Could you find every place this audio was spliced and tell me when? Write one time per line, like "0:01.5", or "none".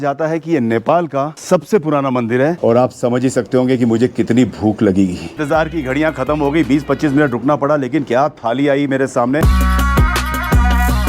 0:02.6
0:05.4
0:09.4